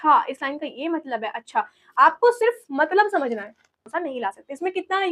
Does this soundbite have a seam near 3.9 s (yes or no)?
yes